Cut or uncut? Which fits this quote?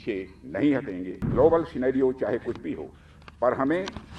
cut